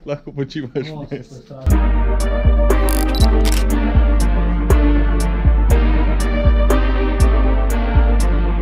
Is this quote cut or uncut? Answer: uncut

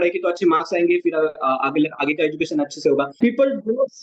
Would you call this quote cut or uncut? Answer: cut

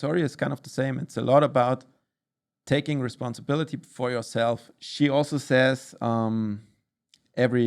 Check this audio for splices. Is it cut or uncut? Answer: cut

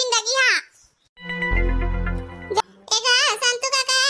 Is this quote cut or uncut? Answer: cut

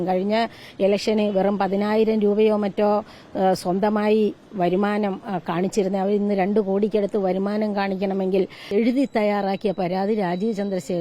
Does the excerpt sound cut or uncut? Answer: cut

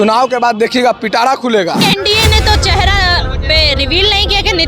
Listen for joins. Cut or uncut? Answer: cut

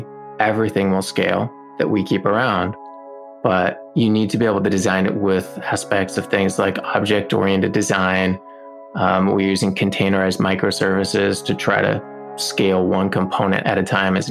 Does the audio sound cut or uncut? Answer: cut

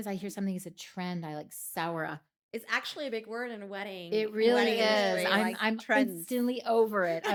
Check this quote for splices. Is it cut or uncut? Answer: uncut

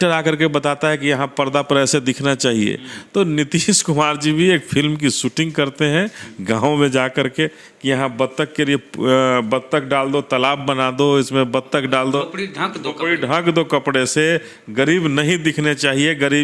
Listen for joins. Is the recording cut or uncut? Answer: uncut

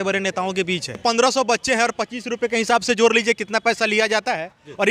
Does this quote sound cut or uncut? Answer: cut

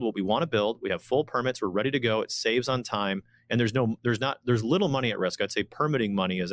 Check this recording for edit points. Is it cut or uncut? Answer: uncut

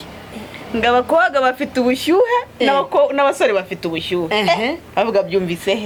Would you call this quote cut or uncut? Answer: uncut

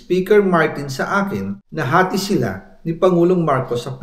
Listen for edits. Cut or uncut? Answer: cut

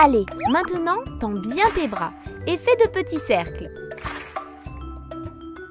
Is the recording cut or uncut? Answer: uncut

